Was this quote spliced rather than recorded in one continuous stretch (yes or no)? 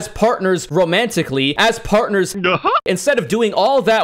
yes